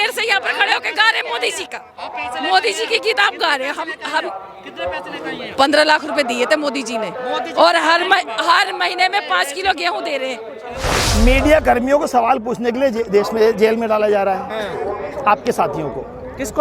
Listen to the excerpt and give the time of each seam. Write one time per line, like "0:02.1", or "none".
0:11.1

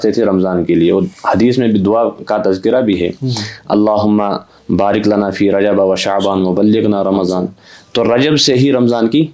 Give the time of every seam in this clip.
none

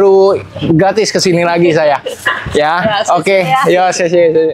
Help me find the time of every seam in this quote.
none

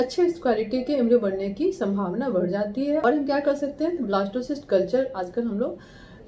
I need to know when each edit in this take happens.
0:03.0

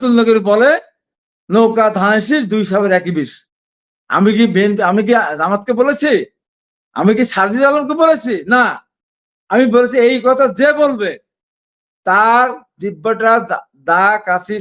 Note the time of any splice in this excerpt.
none

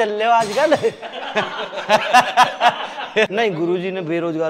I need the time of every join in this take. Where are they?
0:03.3

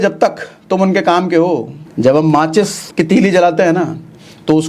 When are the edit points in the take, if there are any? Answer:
0:01.8
0:02.8

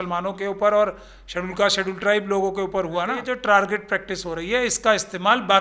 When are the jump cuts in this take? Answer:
0:03.3

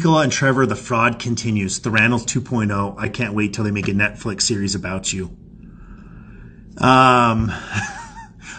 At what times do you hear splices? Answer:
none

